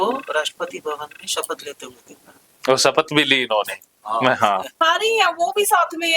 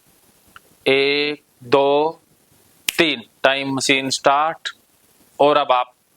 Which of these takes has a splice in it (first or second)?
first